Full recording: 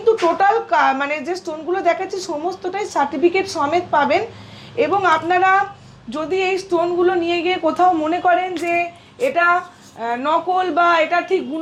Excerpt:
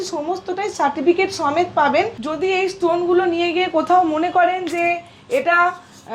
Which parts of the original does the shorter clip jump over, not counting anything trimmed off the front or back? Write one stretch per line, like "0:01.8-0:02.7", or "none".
0:04.4-0:06.1